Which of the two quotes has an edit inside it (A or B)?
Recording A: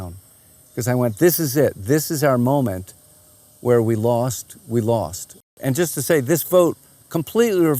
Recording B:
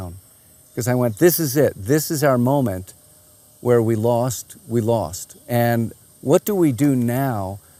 A